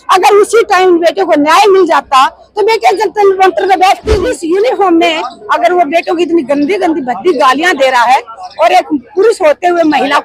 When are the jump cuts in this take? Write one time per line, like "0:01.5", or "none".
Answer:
0:04.4